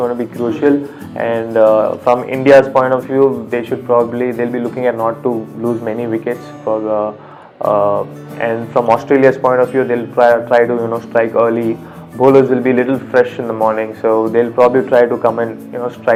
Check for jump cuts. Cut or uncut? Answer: uncut